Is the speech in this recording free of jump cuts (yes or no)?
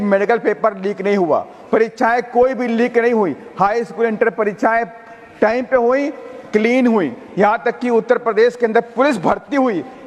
yes